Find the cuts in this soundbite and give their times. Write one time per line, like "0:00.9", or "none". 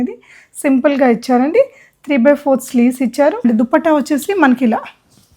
0:03.4